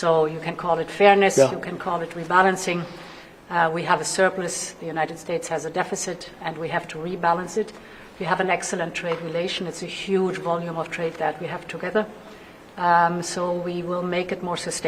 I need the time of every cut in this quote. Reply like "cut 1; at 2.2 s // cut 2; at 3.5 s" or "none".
none

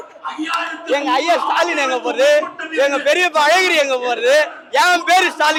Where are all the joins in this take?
none

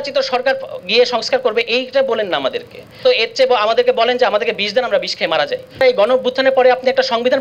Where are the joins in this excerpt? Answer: cut 1; at 3.0 s // cut 2; at 5.8 s

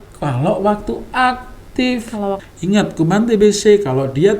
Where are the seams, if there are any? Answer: cut 1; at 2.5 s

